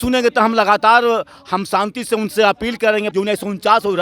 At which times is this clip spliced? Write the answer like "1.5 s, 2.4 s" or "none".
3.1 s